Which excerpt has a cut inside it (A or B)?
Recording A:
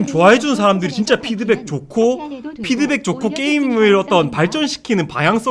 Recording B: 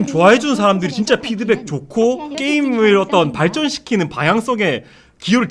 B